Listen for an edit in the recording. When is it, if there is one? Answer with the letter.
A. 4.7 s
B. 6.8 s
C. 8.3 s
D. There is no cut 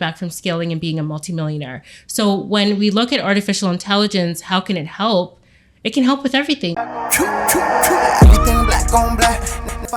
B